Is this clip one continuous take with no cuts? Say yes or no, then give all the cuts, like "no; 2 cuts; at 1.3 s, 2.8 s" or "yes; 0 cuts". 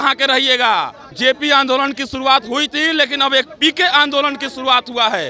no; 1 cut; at 1.0 s